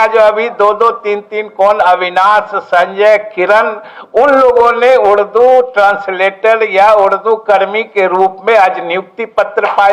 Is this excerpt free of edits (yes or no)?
yes